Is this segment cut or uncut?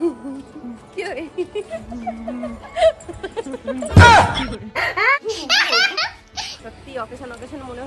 cut